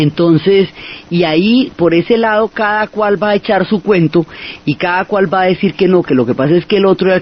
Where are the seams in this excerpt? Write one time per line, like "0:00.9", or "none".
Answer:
0:02.6